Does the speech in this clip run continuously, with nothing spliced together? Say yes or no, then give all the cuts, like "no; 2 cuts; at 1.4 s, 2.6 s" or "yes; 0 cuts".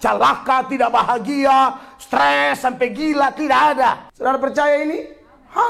no; 1 cut; at 4.1 s